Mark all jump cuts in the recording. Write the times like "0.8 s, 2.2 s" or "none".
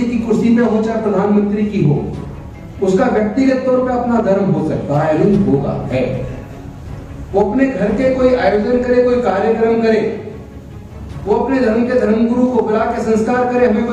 none